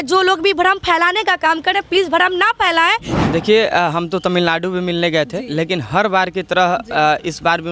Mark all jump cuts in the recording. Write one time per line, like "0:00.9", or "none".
0:03.1